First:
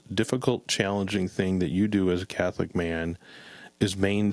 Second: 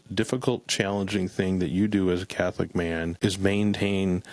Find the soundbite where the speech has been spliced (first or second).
second